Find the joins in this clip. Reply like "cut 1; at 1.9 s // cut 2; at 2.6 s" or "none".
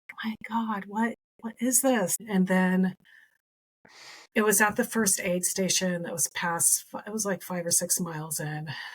cut 1; at 2.2 s